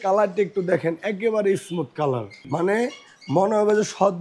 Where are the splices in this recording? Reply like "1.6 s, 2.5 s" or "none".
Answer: 2.3 s